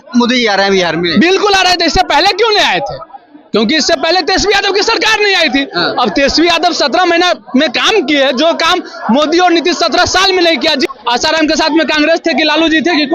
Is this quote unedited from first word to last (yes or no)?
no